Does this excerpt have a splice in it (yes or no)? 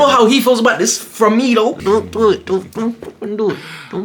yes